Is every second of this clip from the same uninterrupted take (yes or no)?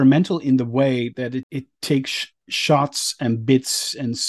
no